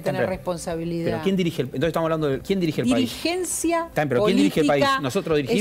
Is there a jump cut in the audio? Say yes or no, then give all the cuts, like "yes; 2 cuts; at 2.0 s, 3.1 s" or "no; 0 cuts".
yes; 2 cuts; at 2.4 s, 3.9 s